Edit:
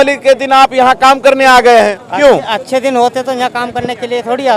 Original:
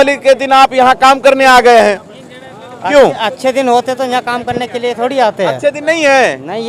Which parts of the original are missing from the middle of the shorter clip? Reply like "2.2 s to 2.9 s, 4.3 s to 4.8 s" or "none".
2.0 s to 2.8 s